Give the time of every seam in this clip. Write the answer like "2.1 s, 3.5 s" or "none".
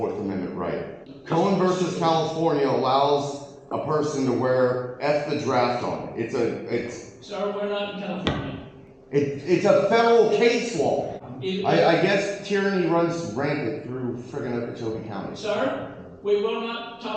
1.1 s, 11.3 s

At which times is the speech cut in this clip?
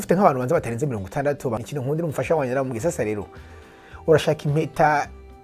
1.6 s

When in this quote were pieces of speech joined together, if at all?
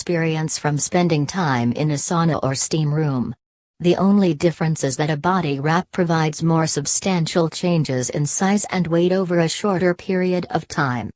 1.8 s

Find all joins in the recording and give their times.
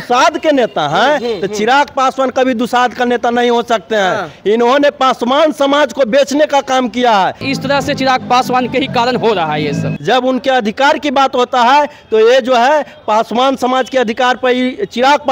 7.5 s, 9.9 s

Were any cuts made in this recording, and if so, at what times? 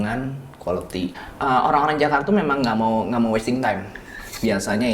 1.2 s

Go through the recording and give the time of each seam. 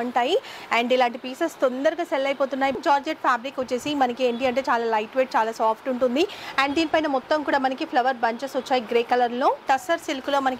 2.8 s, 9.6 s

